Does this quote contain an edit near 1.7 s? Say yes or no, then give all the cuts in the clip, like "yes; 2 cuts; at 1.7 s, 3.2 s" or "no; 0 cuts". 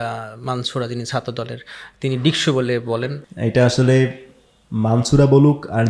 no; 1 cut; at 3.2 s